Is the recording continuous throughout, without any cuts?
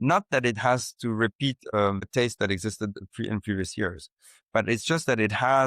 no; 1 cut; at 2.0 s

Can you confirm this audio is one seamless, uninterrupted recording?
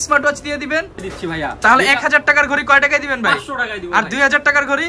no; 1 cut; at 1.0 s

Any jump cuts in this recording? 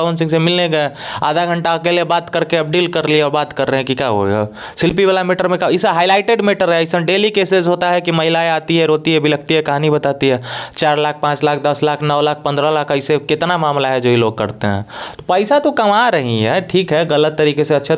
no; 0 cuts

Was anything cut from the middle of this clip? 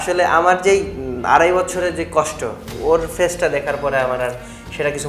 yes; 1 cut; at 2.7 s

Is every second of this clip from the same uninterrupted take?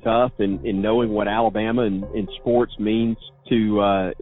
no; 1 cut; at 3.3 s

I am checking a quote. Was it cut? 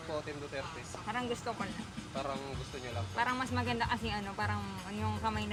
no; 0 cuts

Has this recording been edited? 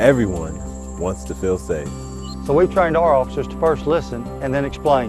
no; 0 cuts

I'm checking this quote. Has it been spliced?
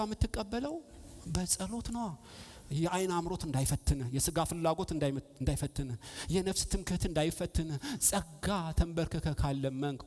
no; 0 cuts

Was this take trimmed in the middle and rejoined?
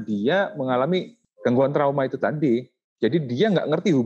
yes; 1 cut; at 1.3 s

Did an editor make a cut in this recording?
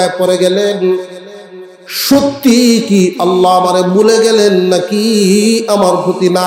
no; 0 cuts

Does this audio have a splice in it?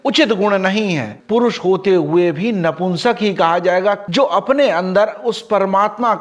yes; 2 cuts; at 1.2 s, 4.0 s

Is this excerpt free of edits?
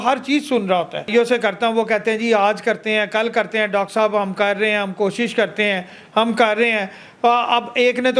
no; 1 cut; at 1.1 s

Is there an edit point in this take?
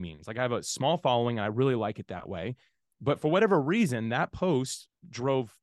no; 0 cuts

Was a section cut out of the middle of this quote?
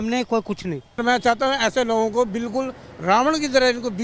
yes; 1 cut; at 1.0 s

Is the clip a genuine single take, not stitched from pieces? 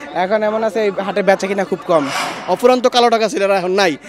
no; 1 cut; at 2.3 s

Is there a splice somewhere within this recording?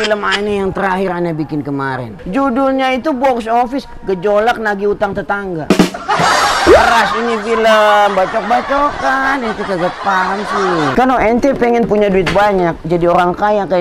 yes; 2 cuts; at 2.1 s, 10.9 s

